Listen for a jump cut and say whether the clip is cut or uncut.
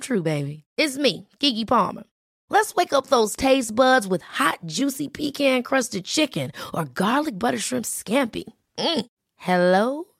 uncut